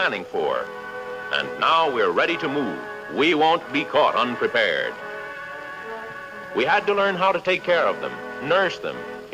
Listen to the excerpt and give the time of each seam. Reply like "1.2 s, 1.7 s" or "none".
2.0 s